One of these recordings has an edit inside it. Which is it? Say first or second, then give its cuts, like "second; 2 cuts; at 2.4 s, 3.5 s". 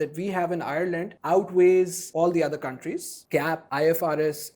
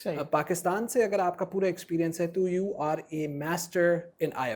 first; 3 cuts; at 1.1 s, 2.0 s, 3.4 s